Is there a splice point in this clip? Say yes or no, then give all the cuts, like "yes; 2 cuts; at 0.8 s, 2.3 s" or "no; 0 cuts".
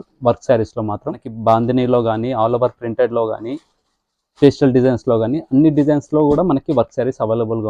yes; 1 cut; at 1.3 s